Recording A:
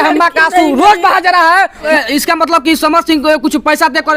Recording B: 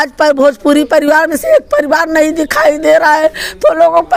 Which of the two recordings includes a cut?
A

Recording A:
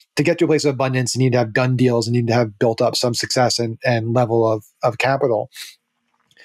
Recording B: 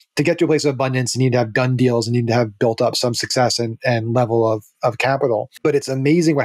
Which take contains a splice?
B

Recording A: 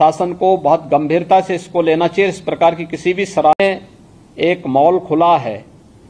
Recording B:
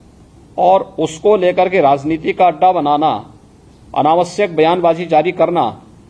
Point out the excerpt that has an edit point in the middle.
A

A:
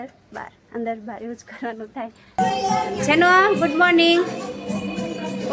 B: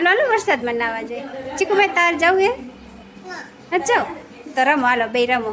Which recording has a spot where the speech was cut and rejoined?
A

